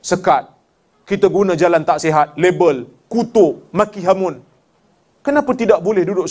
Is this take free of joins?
yes; 0 cuts

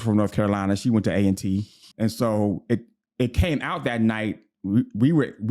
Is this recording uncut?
no; 1 cut; at 1.8 s

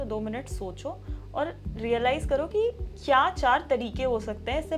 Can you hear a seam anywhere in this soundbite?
no; 0 cuts

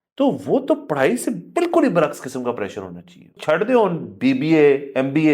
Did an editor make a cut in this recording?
yes; 1 cut; at 3.3 s

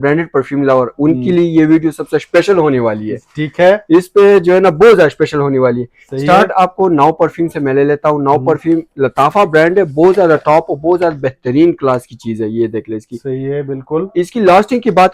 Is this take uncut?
yes; 0 cuts

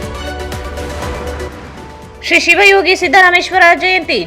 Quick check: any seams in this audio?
yes; 1 cut; at 1.3 s

